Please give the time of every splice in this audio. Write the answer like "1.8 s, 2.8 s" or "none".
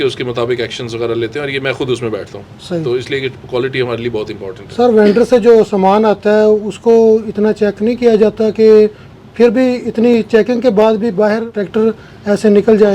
11.5 s